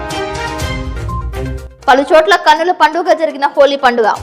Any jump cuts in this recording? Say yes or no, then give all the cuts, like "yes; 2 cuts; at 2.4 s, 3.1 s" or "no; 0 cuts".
no; 0 cuts